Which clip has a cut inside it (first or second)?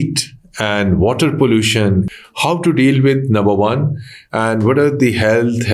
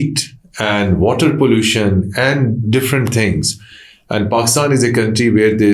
first